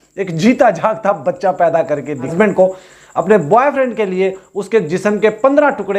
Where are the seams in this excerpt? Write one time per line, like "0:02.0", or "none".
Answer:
0:02.3